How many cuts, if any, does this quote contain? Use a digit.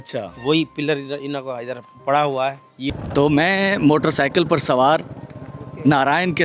1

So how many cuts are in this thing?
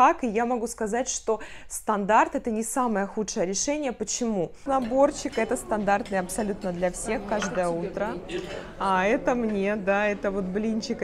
1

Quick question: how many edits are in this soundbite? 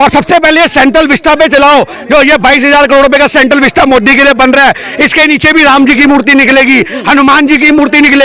0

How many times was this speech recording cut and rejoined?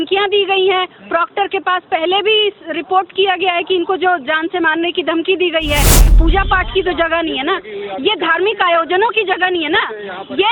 1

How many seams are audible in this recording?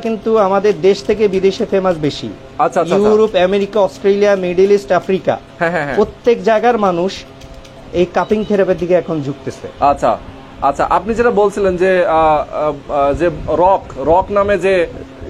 0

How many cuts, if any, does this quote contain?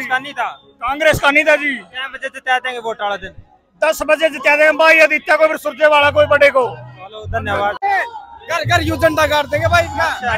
1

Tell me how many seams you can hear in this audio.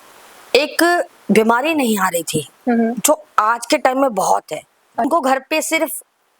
1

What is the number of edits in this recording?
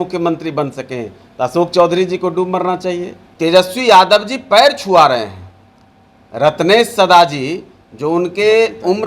1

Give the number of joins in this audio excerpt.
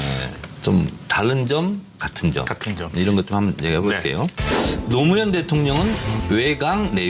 0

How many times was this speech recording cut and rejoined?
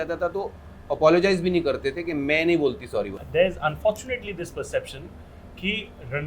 1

